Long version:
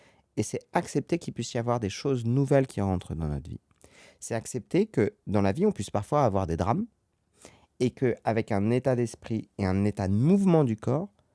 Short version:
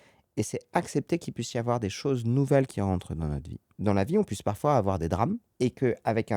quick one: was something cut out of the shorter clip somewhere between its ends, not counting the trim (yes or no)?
yes